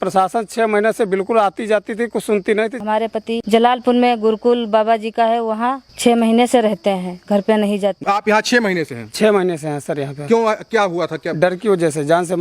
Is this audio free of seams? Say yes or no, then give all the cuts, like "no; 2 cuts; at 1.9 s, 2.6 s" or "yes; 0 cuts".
no; 2 cuts; at 2.8 s, 8.0 s